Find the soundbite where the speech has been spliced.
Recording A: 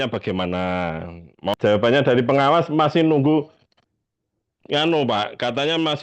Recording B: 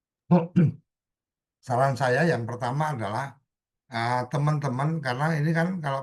A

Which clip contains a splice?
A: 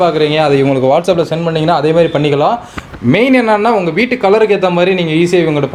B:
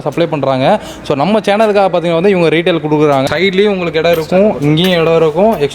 B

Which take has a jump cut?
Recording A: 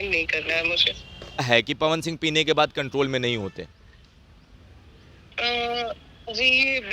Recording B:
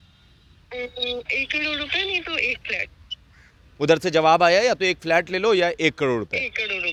A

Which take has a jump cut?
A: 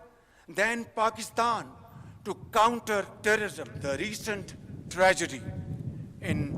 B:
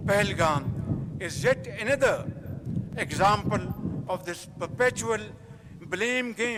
A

